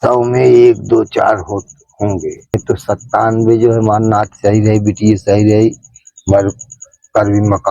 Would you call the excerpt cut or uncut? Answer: cut